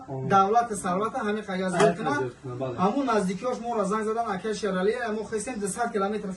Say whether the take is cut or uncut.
uncut